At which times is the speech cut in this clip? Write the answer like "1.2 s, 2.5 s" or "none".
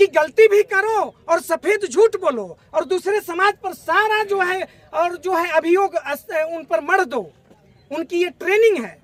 none